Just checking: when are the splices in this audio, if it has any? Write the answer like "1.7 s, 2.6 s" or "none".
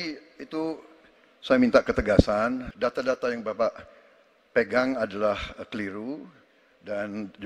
2.7 s